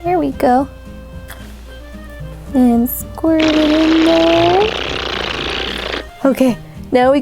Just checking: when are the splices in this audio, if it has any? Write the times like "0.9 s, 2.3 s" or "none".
6.0 s